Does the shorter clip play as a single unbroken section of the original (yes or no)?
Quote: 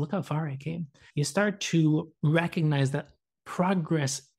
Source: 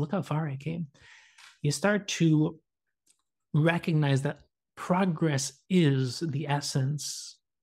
no